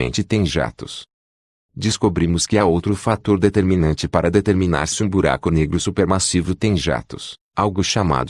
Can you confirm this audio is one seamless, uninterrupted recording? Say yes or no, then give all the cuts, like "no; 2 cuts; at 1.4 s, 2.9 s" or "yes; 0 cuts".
yes; 0 cuts